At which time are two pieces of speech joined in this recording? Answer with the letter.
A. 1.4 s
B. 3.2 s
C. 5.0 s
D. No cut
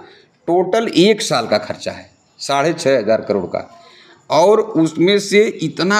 D